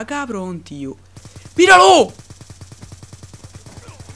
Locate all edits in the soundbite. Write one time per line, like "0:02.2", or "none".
none